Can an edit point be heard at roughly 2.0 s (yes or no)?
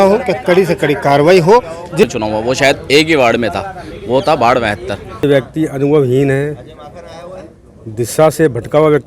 yes